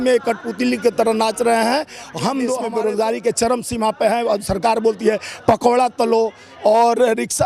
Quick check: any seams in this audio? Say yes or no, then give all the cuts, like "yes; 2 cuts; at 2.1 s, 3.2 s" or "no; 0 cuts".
yes; 1 cut; at 2.6 s